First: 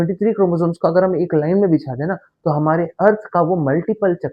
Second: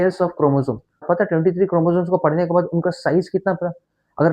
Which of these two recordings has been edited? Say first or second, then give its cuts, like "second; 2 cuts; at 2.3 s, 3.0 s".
second; 1 cut; at 1.0 s